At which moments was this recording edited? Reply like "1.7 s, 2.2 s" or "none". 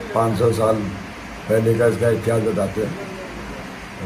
none